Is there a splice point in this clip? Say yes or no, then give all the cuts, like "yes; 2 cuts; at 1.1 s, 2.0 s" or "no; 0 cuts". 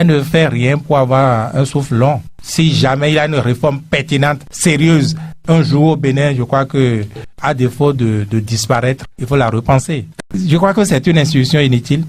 yes; 1 cut; at 10.3 s